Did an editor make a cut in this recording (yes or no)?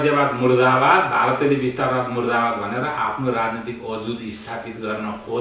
no